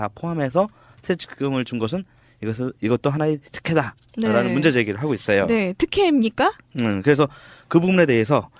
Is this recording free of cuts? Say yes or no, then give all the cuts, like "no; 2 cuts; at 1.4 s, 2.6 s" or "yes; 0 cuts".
yes; 0 cuts